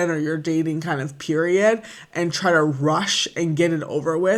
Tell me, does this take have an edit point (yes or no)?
no